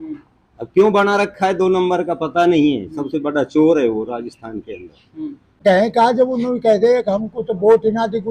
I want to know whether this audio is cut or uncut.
cut